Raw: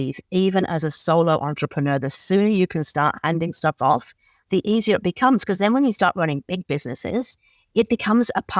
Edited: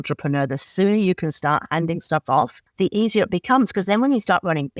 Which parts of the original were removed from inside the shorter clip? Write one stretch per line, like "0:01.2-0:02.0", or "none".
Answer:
0:04.1-0:04.3